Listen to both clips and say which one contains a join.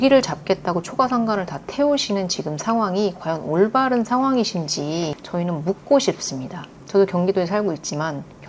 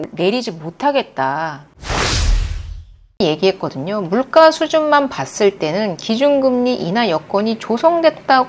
second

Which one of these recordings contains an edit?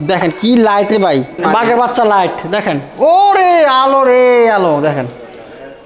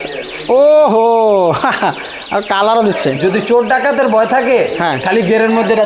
first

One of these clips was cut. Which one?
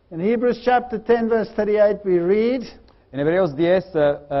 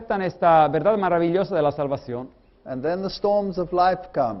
first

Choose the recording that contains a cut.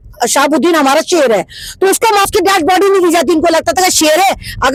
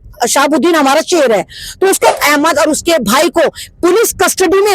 second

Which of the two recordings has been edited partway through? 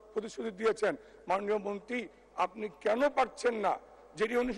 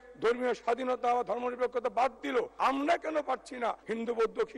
second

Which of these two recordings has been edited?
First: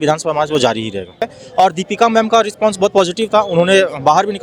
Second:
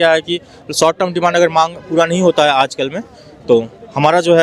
first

